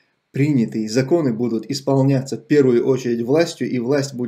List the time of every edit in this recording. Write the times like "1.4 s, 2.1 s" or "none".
none